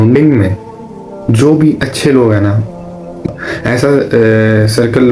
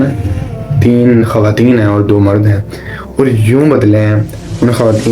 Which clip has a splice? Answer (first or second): first